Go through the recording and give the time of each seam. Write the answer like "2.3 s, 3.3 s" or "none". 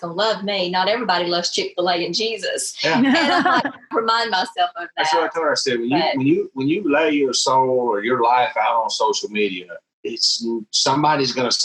3.9 s